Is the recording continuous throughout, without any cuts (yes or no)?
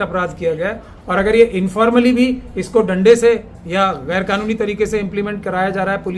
yes